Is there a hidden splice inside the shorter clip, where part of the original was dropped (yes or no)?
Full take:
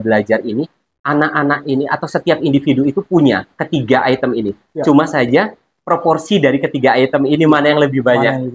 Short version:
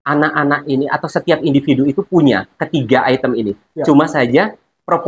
no